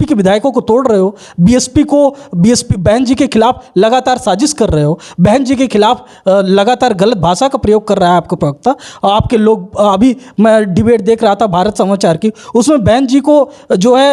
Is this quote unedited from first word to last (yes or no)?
yes